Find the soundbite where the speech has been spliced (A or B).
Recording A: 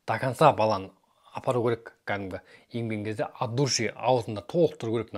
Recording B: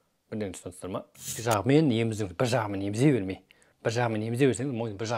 B